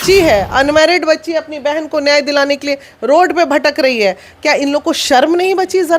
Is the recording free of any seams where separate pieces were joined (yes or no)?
yes